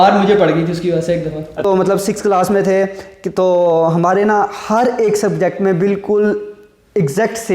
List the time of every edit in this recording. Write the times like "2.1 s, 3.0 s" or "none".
1.6 s